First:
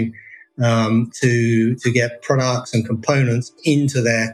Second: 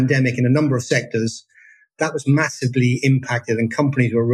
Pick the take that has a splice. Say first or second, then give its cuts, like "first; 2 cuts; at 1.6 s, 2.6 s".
second; 1 cut; at 2.0 s